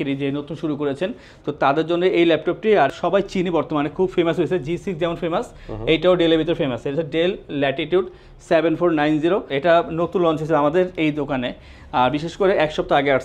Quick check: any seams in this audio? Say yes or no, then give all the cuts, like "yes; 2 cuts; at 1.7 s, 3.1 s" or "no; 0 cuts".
yes; 2 cuts; at 2.9 s, 9.5 s